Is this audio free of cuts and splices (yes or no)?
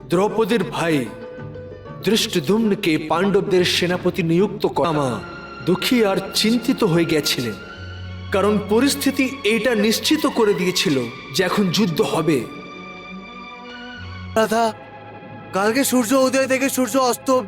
no